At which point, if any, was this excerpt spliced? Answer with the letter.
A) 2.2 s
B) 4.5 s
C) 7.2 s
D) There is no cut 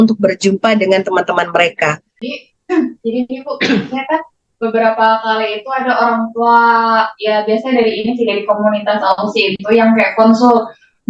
A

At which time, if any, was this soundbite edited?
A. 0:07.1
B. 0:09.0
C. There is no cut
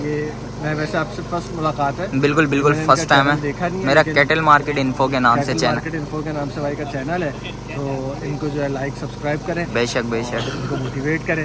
C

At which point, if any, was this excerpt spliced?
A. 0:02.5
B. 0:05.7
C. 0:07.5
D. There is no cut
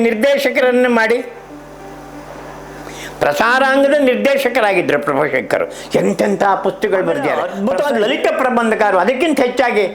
C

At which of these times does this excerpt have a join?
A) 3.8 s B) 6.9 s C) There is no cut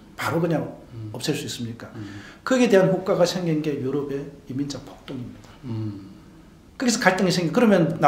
C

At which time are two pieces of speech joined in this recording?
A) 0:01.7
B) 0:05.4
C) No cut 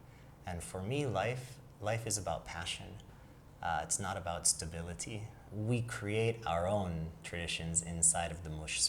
B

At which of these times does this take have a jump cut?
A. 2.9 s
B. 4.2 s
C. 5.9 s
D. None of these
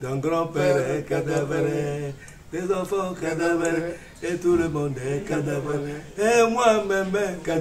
D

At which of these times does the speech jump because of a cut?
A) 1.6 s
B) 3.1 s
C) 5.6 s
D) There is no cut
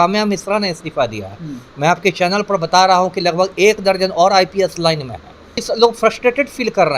C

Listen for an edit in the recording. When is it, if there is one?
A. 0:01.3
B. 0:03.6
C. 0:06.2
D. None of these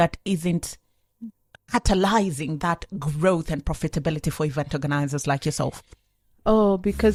D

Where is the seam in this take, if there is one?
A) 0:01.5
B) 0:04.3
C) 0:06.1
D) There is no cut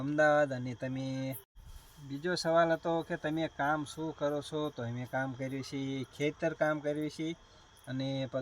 A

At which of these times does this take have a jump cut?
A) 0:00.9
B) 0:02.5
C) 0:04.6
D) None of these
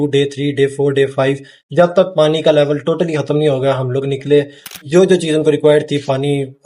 C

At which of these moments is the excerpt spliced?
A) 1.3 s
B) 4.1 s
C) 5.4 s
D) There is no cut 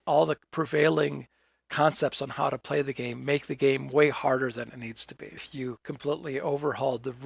C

